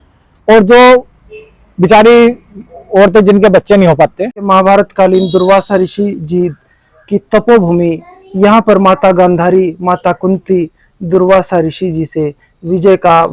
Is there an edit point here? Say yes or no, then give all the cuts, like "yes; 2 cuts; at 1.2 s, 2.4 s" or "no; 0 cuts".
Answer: yes; 1 cut; at 4.4 s